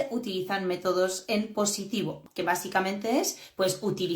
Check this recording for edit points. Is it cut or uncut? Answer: cut